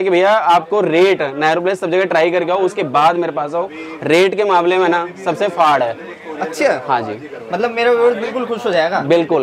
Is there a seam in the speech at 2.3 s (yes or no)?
no